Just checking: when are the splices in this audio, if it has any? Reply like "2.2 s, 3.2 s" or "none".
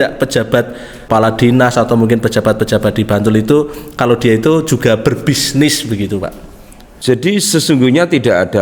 1.1 s

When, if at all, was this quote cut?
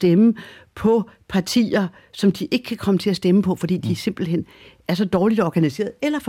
none

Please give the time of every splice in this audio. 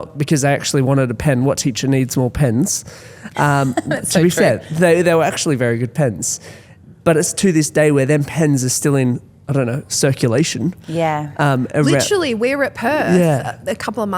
none

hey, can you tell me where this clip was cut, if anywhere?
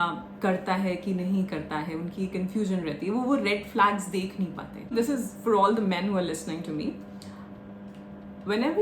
4.9 s

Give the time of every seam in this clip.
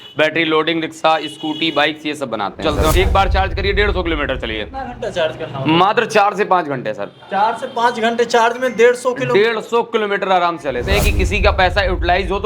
2.6 s, 11.0 s

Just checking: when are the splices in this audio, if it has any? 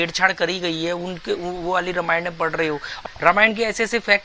2.9 s

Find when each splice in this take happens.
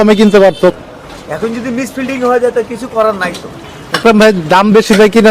0.7 s, 4.0 s

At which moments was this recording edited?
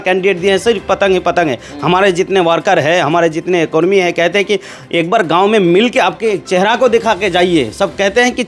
none

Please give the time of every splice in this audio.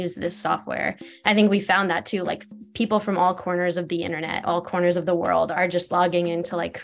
5.5 s

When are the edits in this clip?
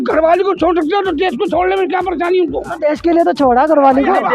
none

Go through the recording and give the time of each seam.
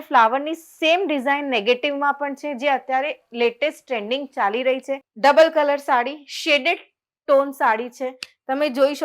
5.1 s

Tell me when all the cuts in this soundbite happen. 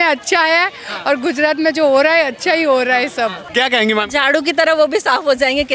3.4 s

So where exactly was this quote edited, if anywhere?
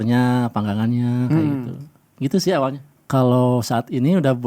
2.8 s

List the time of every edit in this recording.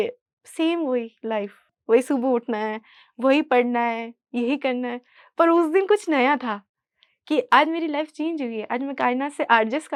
none

